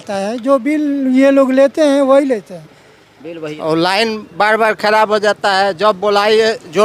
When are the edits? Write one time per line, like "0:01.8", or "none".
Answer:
0:03.6